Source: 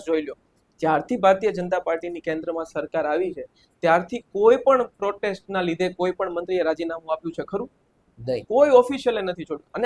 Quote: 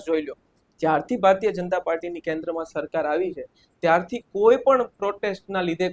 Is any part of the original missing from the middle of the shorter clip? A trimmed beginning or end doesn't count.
no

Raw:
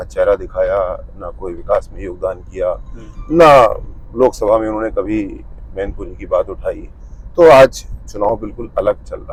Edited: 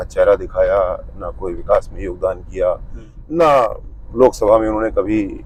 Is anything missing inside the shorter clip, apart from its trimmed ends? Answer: no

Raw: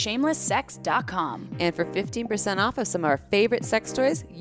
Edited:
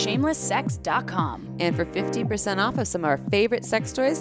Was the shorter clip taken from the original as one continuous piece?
yes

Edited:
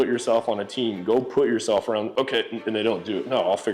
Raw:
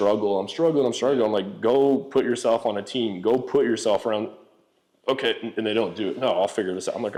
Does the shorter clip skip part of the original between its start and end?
yes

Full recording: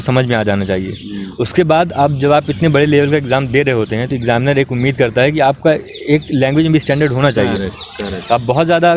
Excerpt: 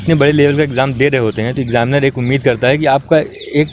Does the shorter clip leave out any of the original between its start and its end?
no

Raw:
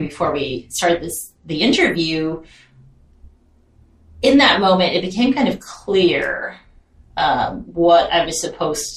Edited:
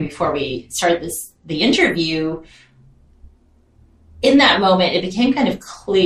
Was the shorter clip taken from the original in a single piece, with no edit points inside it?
yes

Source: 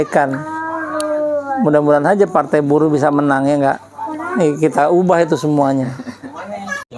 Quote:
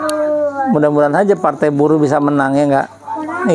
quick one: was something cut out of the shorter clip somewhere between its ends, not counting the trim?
no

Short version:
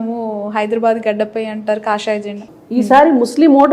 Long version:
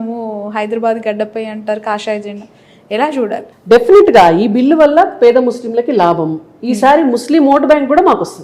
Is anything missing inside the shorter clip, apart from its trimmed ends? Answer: yes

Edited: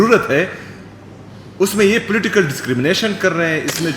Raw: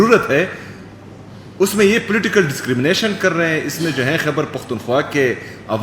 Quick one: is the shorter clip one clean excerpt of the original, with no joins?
yes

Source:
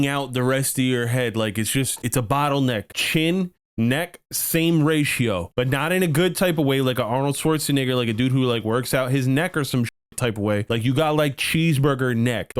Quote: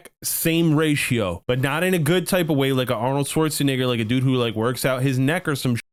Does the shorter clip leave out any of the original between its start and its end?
no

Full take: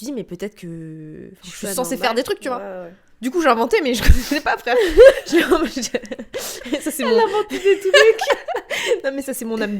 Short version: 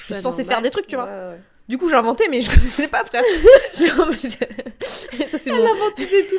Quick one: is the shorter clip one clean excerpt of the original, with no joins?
yes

